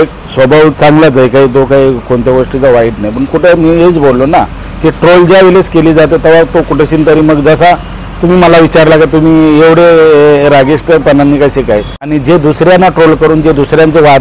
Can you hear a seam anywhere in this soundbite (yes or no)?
yes